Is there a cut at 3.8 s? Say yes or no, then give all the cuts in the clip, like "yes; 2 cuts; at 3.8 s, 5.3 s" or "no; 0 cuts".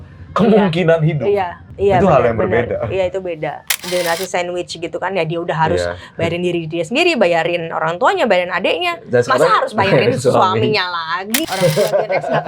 yes; 3 cuts; at 1.6 s, 3.8 s, 11.4 s